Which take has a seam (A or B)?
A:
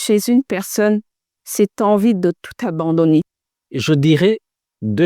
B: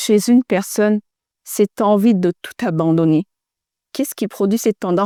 A